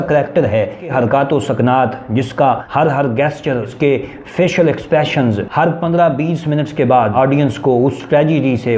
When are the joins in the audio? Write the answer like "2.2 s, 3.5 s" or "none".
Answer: 0.9 s, 2.6 s, 3.7 s, 7.1 s